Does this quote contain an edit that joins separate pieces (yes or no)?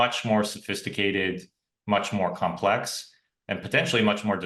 no